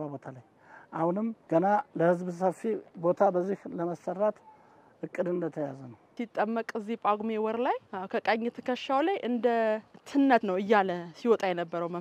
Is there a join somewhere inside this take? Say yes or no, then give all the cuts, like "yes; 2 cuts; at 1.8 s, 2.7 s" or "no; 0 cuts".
yes; 5 cuts; at 1.4 s, 2.9 s, 6.1 s, 7.9 s, 10.4 s